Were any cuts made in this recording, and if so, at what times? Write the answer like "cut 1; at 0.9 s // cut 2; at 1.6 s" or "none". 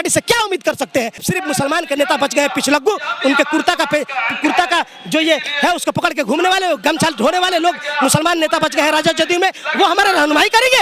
cut 1; at 1.2 s